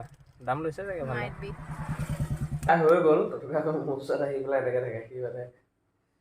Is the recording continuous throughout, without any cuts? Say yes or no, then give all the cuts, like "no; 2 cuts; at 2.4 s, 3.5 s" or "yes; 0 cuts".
no; 1 cut; at 2.7 s